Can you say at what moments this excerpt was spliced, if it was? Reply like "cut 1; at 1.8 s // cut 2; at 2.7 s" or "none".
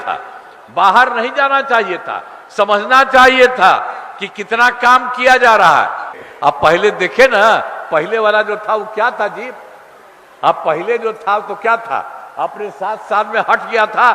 cut 1; at 6.1 s